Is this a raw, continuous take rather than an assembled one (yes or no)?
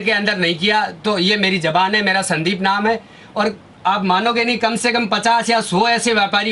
yes